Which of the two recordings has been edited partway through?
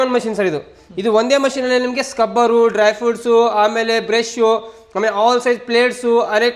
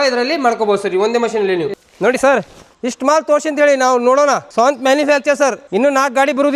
second; 4 cuts; at 1.7 s, 2.6 s, 4.5 s, 5.6 s

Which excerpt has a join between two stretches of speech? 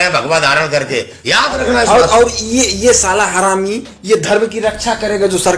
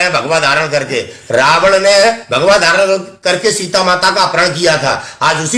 first; 1 cut; at 1.1 s

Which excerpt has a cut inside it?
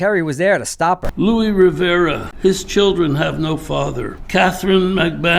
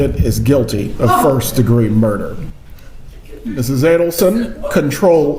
first; 3 cuts; at 1.1 s, 2.3 s, 4.2 s

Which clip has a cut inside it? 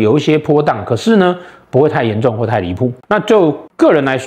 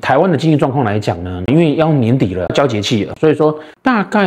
first; 1 cut; at 3.0 s

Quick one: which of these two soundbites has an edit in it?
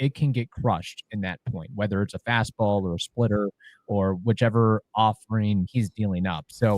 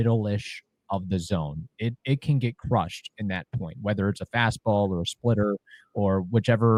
first; 1 cut; at 5.7 s

